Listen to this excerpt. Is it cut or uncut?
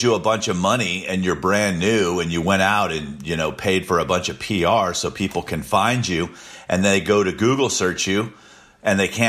uncut